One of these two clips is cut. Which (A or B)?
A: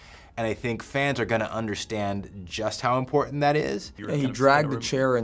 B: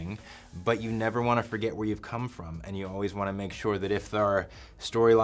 A